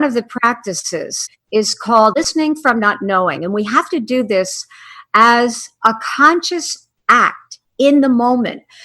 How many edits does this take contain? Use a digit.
2